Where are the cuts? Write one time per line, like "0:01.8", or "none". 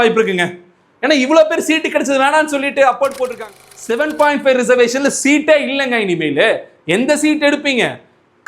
0:03.4